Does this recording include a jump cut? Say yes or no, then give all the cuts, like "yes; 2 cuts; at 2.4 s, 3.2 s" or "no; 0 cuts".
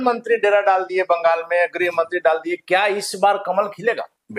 no; 0 cuts